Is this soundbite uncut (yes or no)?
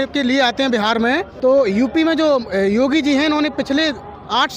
no